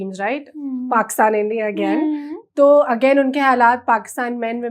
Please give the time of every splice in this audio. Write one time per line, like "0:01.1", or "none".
none